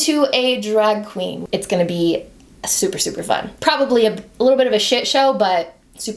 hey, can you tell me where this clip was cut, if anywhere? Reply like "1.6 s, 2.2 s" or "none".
1.4 s, 3.5 s